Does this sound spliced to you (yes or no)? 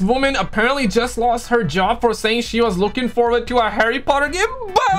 no